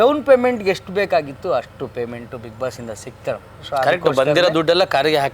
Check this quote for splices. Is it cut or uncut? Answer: uncut